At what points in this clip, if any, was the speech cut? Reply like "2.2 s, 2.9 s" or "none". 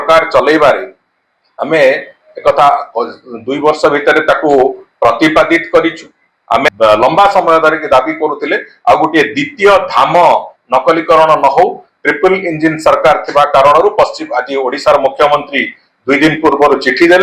6.7 s